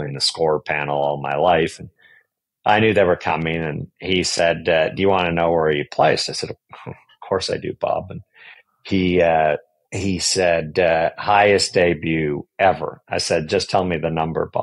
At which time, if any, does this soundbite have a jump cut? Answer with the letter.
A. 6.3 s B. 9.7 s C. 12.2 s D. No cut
D